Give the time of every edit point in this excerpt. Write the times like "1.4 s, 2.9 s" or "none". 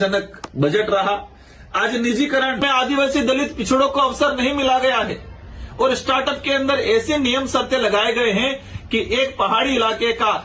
2.6 s